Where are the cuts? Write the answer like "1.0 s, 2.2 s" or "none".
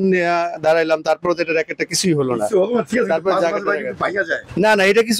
none